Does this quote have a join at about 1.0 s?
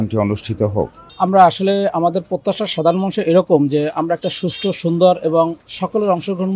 yes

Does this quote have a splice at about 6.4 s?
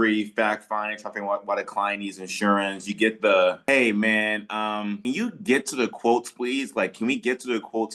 no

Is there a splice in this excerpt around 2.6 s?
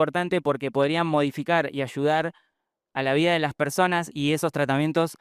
no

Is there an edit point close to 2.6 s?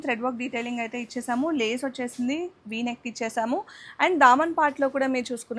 no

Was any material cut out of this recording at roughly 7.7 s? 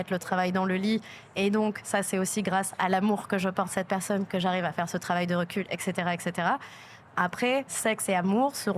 yes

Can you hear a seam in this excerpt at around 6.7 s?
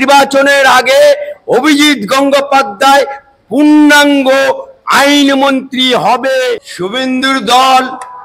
yes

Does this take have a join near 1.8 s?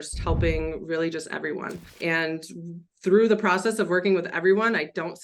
yes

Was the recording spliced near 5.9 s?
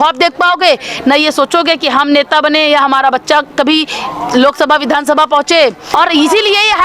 yes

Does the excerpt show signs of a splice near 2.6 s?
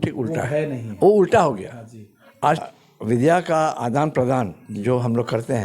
yes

